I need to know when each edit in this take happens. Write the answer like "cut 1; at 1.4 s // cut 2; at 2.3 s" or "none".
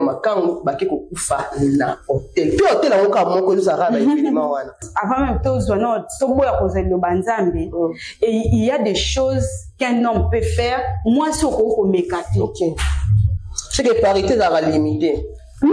cut 1; at 4.9 s